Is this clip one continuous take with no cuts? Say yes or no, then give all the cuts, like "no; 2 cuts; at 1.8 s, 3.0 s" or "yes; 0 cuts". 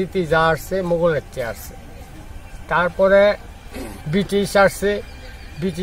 yes; 0 cuts